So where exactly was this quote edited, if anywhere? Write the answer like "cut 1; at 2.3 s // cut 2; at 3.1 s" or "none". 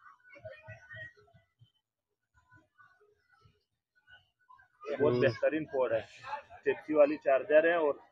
none